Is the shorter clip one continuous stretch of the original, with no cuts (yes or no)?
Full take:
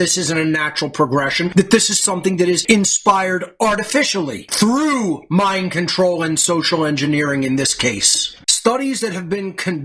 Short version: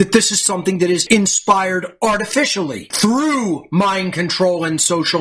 yes